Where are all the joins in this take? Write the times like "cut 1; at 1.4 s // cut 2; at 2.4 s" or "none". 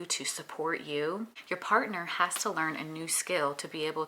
cut 1; at 1.4 s